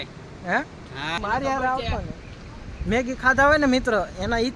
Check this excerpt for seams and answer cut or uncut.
cut